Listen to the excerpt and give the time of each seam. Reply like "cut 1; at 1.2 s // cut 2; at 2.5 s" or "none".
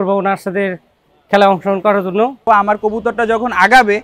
cut 1; at 2.4 s